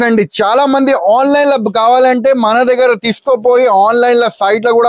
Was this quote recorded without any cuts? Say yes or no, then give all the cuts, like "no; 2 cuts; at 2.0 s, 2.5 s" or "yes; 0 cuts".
yes; 0 cuts